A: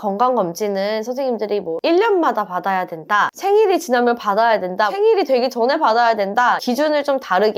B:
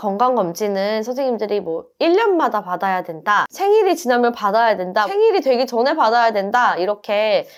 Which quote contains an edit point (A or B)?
A